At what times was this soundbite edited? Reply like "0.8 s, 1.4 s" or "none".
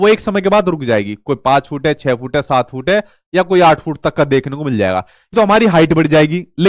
5.3 s